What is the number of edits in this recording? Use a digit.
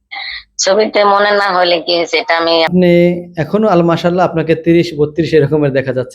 1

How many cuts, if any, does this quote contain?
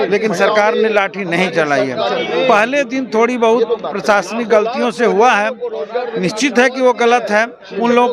0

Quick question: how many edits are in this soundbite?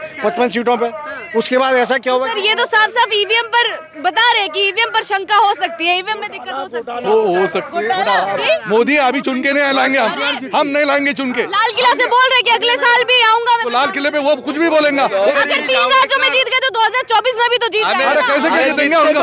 2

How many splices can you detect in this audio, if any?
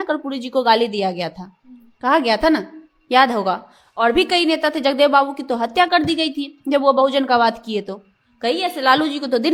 0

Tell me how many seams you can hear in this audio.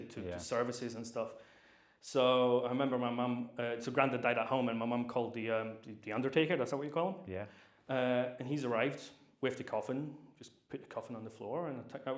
0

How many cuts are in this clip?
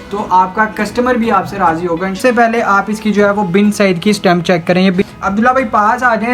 2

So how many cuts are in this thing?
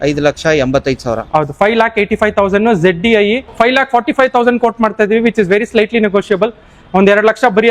1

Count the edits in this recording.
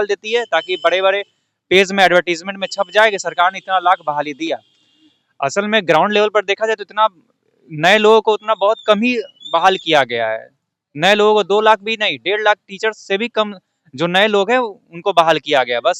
0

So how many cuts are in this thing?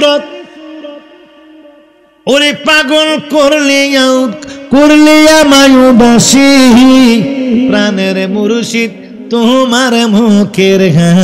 0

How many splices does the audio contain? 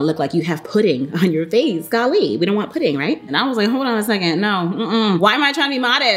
1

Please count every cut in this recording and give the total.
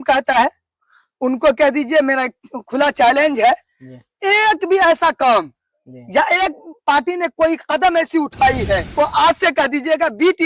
1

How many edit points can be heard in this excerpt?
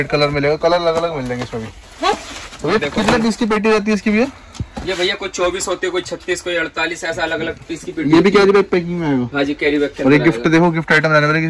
0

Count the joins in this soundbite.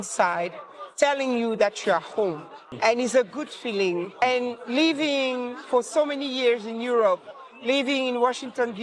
2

